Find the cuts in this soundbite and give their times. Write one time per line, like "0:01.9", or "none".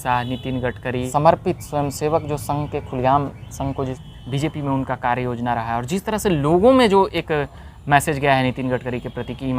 0:01.1
0:04.0